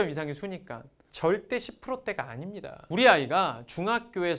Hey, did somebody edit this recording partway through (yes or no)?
yes